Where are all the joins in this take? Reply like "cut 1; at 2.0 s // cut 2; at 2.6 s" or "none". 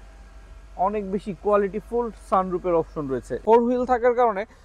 cut 1; at 3.3 s